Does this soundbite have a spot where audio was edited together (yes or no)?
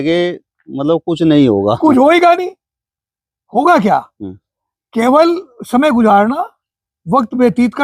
no